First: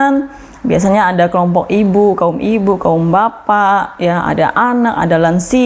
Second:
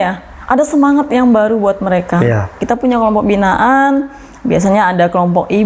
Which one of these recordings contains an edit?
second; 1 cut; at 2.6 s

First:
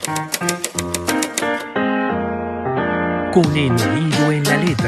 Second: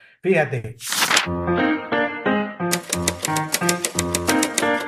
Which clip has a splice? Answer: second; 1 cut; at 1.3 s

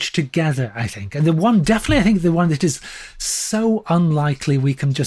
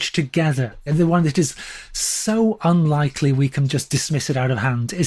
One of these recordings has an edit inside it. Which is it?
second; 1 cut; at 1.0 s

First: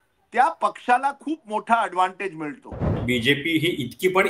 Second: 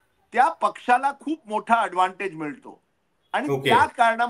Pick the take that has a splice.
first; 1 cut; at 3.0 s

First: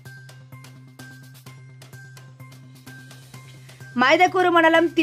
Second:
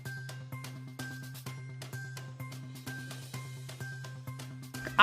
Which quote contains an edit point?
second; 1 cut; at 3.5 s

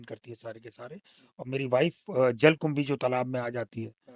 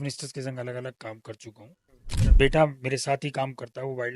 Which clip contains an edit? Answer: second; 1 cut; at 2.2 s

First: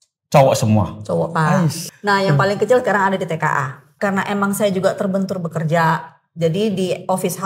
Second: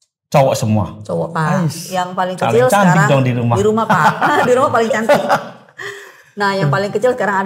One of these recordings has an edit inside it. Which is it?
first; 2 cuts; at 1.8 s, 3.9 s

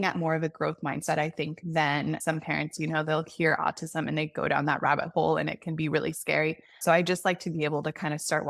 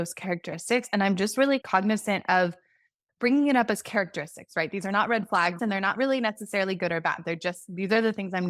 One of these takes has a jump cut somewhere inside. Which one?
second; 1 cut; at 5.6 s

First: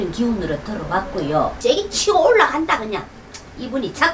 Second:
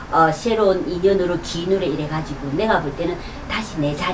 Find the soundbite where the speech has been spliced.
first; 1 cut; at 1.5 s

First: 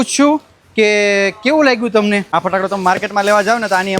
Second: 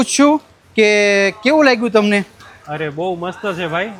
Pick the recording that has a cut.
first; 1 cut; at 2.3 s

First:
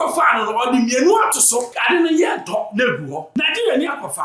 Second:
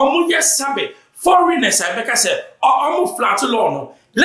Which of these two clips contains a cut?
first; 2 cuts; at 1.8 s, 3.2 s

